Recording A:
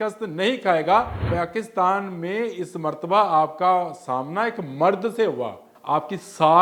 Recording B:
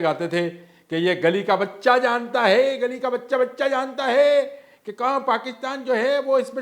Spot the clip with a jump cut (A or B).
A